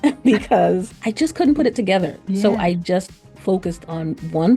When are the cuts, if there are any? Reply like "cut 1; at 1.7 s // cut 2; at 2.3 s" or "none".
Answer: cut 1; at 1.0 s // cut 2; at 2.2 s